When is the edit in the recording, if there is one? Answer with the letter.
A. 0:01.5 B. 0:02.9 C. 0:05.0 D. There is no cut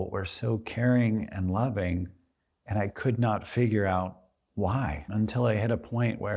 C